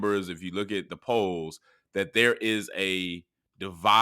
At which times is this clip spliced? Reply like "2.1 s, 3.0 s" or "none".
0.9 s